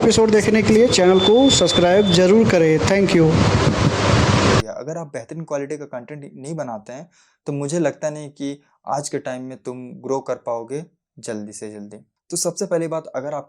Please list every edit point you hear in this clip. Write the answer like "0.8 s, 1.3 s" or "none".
4.7 s